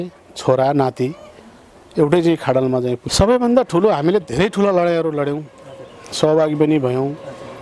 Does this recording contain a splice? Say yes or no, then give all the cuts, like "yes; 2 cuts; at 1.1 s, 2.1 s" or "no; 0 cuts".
yes; 1 cut; at 3.0 s